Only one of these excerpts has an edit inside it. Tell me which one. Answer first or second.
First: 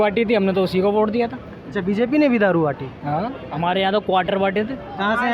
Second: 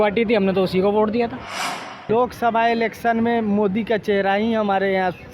second